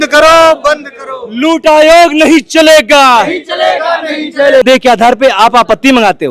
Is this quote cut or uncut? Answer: cut